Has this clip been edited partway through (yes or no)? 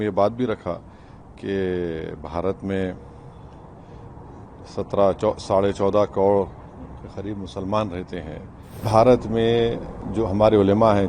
yes